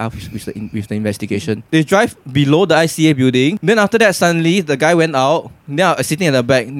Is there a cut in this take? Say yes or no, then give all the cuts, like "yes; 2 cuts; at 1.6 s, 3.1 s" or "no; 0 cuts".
yes; 2 cuts; at 1.6 s, 3.6 s